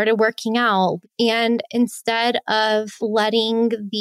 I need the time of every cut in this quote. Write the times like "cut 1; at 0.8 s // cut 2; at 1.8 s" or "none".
cut 1; at 1.0 s // cut 2; at 2.9 s